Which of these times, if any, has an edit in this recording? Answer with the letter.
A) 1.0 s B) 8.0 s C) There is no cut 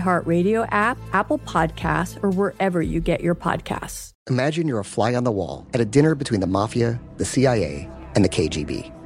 A